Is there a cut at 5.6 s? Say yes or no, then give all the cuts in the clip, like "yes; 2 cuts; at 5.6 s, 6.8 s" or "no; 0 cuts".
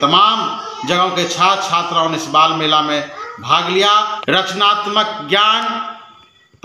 no; 1 cut; at 4.2 s